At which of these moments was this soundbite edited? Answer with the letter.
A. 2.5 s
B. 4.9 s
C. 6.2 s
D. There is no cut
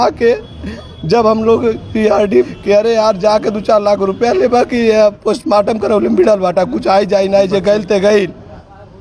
A